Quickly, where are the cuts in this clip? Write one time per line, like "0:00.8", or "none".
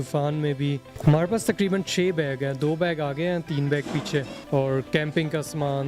0:00.9
0:04.4